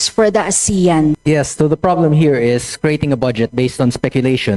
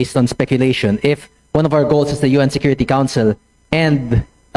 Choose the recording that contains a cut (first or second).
first